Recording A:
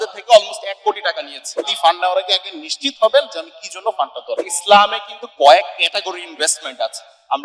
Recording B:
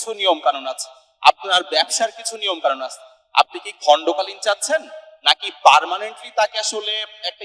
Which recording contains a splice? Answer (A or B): A